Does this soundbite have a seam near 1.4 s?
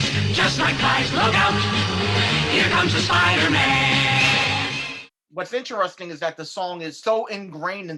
no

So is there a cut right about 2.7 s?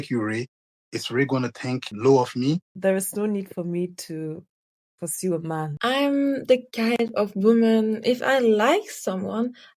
yes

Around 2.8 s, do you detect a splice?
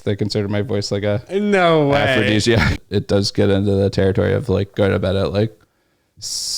yes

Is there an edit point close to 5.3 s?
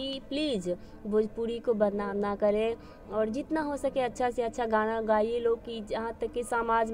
no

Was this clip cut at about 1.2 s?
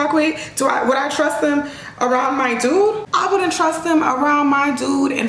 no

